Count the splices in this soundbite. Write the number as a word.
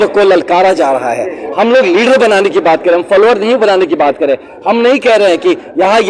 zero